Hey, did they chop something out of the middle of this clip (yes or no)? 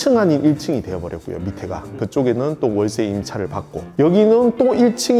no